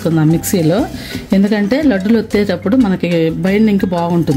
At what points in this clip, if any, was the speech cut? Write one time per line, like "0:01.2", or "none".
none